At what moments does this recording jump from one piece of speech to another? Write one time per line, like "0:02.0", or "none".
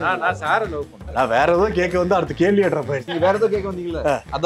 0:01.0
0:03.1